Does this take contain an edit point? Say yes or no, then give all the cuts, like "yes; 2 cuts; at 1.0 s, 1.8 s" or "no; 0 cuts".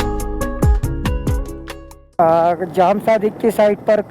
yes; 1 cut; at 2.2 s